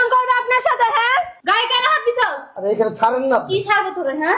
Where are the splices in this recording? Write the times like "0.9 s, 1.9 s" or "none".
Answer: 1.4 s